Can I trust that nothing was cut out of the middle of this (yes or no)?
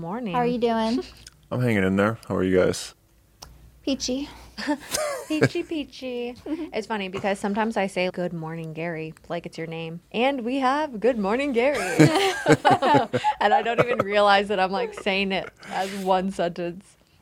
no